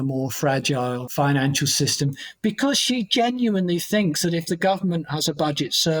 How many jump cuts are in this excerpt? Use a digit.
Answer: 1